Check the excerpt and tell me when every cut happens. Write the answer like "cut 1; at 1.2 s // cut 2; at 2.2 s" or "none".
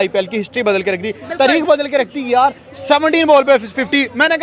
none